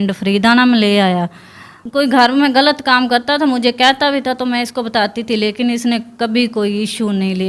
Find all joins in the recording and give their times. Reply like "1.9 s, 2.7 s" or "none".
1.2 s